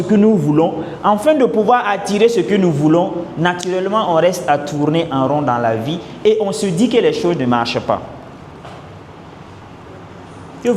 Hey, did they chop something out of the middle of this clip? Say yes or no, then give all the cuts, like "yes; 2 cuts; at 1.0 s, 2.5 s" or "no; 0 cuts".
no; 0 cuts